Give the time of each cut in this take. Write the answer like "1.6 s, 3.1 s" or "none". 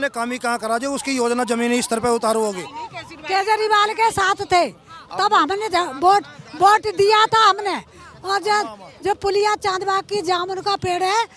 none

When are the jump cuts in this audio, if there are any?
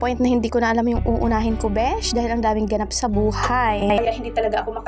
none

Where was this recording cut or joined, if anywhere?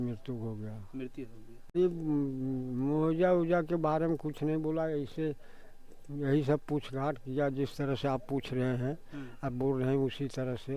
1.8 s

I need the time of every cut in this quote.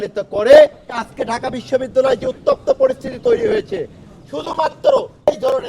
1.1 s

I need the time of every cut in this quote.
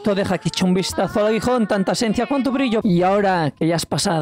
2.8 s

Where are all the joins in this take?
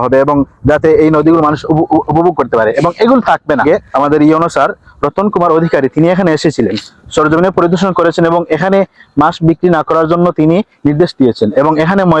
3.8 s

